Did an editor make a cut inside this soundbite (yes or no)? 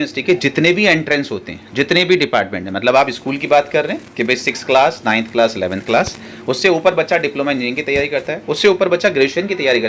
no